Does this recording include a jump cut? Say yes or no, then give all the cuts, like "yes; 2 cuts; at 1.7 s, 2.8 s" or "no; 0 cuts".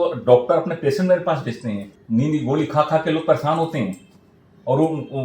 yes; 1 cut; at 1.9 s